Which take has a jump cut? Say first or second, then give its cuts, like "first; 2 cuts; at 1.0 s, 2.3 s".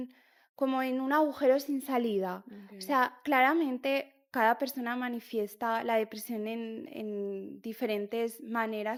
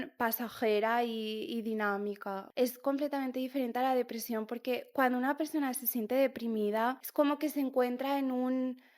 second; 2 cuts; at 2.4 s, 7.0 s